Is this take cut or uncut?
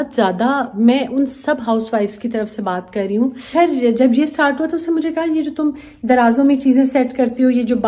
cut